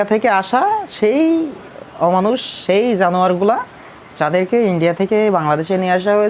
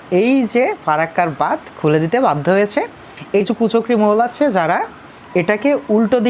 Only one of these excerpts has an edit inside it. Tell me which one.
second; 1 cut; at 3.4 s

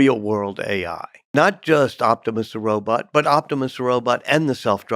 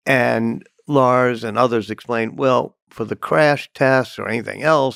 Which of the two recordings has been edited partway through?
first; 1 cut; at 1.2 s

